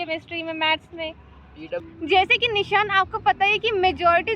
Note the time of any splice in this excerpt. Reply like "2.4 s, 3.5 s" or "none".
1.9 s